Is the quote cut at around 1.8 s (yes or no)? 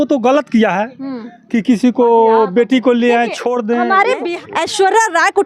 no